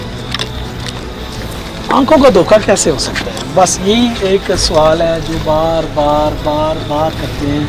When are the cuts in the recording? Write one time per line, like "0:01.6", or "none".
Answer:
none